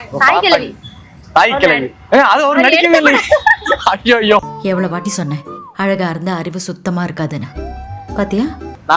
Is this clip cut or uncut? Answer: cut